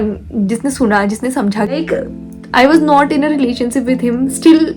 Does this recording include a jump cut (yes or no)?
yes